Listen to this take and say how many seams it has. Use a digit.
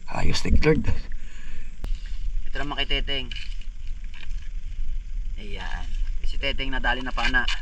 1